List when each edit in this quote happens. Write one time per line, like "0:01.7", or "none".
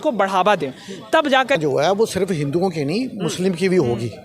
0:01.6